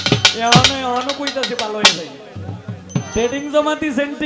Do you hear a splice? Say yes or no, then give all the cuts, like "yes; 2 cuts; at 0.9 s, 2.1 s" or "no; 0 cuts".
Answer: no; 0 cuts